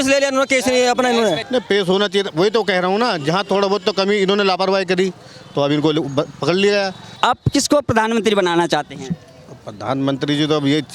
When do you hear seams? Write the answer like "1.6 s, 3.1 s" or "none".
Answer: 1.4 s, 7.0 s